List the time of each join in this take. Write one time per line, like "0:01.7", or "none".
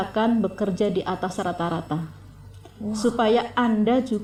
none